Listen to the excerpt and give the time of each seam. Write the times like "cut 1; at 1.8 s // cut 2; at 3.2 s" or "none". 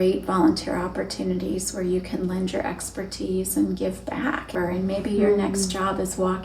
cut 1; at 4.5 s